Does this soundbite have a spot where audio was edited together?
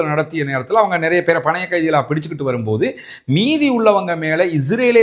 no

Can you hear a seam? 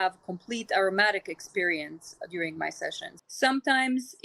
yes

